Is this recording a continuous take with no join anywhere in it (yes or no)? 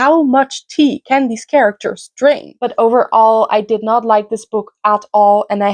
no